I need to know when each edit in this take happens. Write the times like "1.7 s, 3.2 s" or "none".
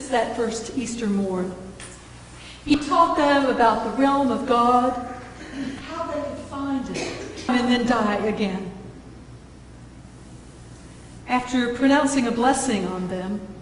none